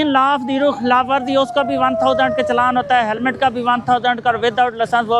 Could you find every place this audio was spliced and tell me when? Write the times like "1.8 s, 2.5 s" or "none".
none